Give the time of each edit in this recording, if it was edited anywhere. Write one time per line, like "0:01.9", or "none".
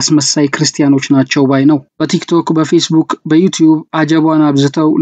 0:01.9